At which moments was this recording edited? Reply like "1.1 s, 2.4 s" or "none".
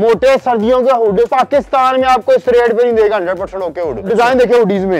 1.3 s, 4.1 s